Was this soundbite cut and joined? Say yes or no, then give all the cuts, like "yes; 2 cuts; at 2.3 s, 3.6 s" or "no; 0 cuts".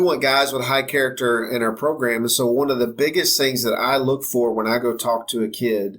no; 0 cuts